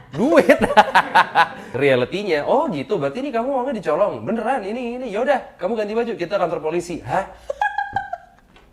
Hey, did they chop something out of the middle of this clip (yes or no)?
yes